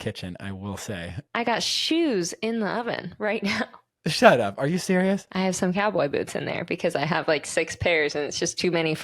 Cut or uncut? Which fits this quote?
cut